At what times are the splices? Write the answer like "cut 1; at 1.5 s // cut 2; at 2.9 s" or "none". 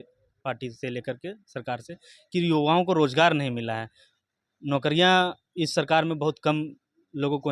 none